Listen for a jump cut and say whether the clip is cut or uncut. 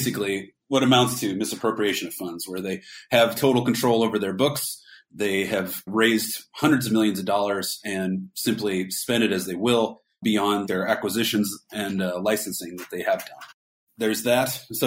uncut